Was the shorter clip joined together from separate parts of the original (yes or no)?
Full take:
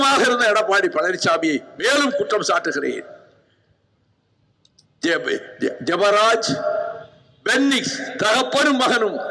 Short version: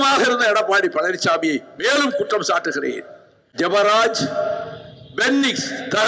yes